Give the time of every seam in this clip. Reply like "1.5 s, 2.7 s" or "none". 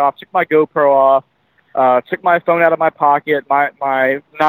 none